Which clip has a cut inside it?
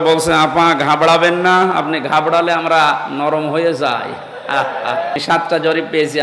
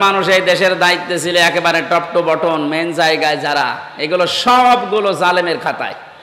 first; 1 cut; at 5.2 s

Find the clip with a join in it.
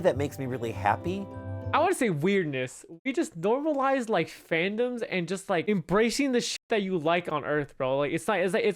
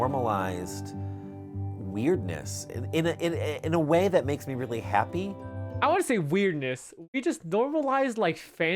first; 1 cut; at 5.6 s

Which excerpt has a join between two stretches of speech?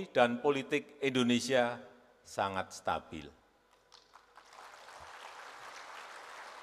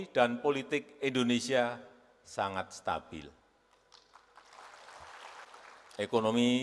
second; 1 cut; at 5.5 s

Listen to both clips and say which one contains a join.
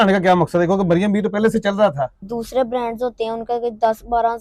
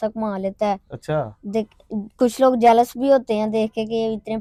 first; 1 cut; at 2.2 s

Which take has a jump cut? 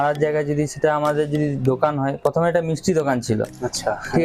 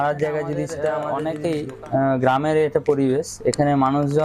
second; 1 cut; at 1.0 s

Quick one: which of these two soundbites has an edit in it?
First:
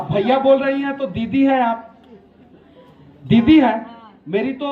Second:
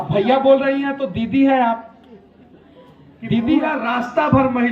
second; 1 cut; at 3.7 s

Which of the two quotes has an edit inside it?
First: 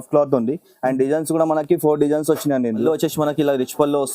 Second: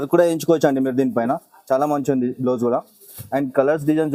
first; 1 cut; at 2.8 s

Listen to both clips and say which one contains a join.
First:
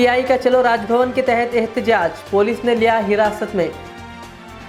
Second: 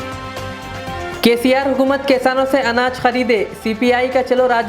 second; 1 cut; at 1.1 s

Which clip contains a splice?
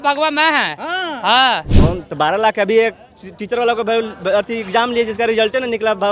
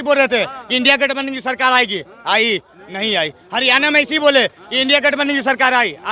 first; 1 cut; at 1.7 s

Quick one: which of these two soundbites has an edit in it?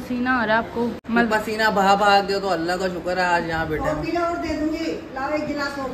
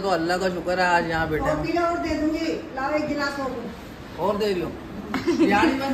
first; 1 cut; at 1.0 s

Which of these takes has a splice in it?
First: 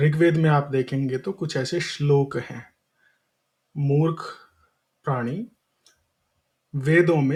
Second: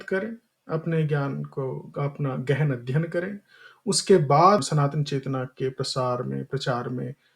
second; 1 cut; at 4.6 s

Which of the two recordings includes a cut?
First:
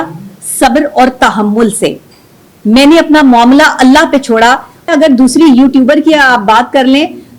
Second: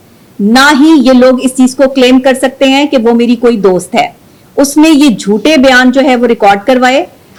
first; 1 cut; at 4.9 s

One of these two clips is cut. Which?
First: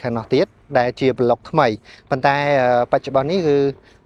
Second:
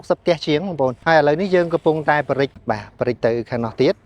second; 2 cuts; at 1.0 s, 2.5 s

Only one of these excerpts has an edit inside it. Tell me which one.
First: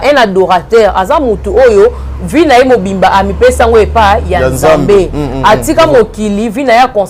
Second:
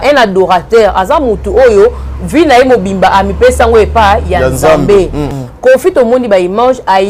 second; 1 cut; at 5.2 s

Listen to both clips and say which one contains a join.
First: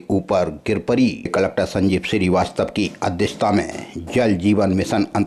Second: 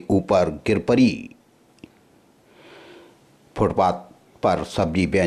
first; 1 cut; at 1.3 s

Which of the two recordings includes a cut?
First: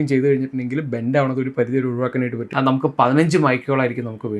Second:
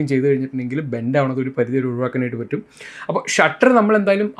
first; 1 cut; at 2.4 s

